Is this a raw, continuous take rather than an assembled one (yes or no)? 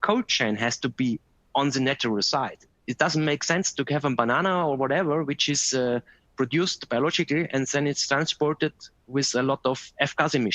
no